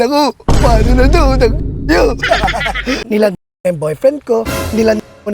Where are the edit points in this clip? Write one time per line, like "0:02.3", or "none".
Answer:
0:03.0